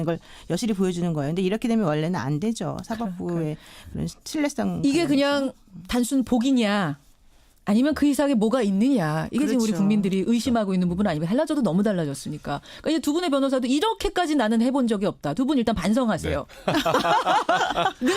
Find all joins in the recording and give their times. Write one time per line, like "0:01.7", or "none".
0:09.1